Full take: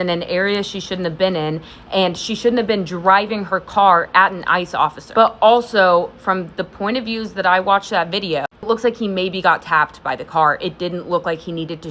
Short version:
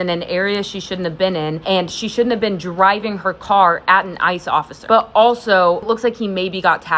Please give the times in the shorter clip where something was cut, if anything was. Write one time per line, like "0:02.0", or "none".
0:01.6
0:05.8